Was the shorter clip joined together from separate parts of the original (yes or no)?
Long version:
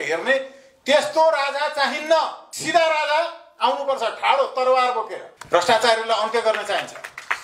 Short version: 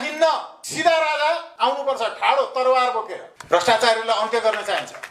yes